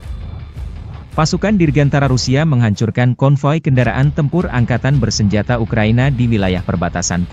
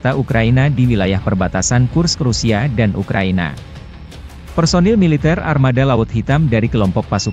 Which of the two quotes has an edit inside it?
first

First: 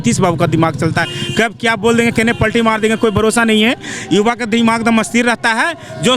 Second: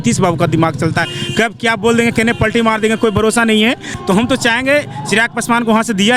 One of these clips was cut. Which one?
second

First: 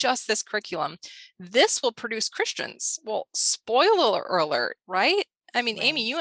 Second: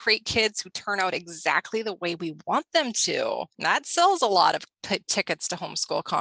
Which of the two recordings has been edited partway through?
second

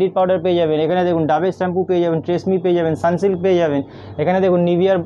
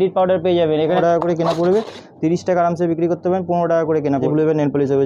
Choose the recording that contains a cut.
second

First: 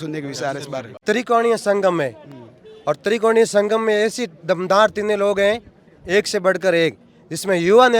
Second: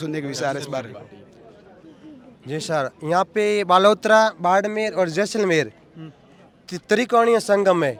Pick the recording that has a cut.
first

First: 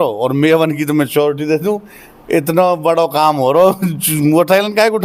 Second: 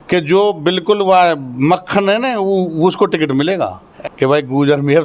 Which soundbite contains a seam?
second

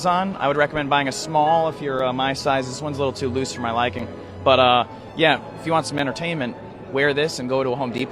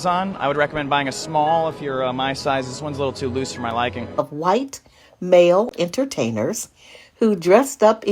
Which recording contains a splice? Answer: second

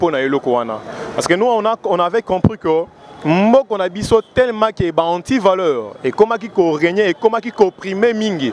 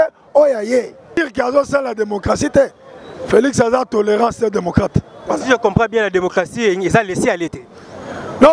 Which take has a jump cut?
second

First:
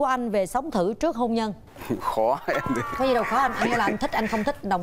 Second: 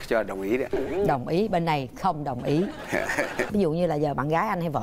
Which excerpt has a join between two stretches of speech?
second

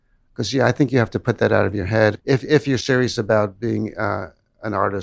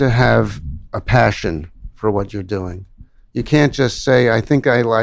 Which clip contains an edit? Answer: first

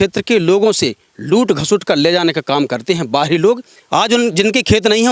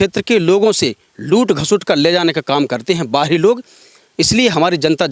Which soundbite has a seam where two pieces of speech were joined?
first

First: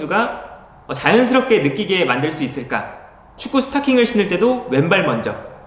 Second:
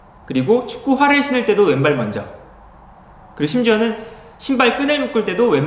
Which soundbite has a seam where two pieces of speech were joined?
first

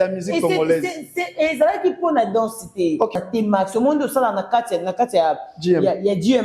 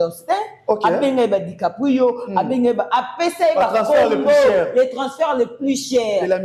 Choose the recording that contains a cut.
first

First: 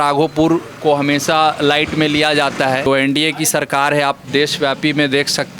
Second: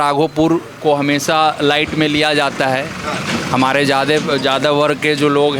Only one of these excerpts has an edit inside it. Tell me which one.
first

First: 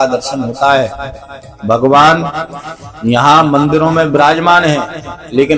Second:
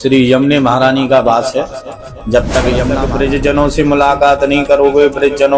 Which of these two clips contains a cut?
second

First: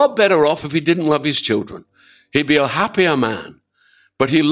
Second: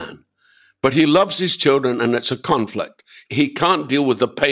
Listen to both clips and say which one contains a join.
second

